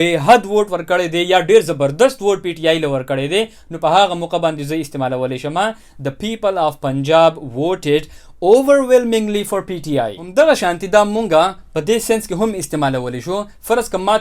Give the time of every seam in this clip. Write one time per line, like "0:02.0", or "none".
0:10.2